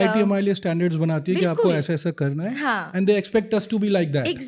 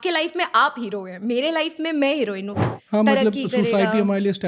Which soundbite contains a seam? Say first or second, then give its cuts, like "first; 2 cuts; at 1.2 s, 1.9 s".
second; 1 cut; at 2.7 s